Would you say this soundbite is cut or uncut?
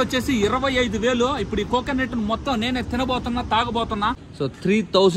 cut